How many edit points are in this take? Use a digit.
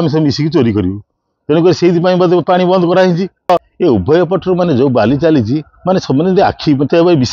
1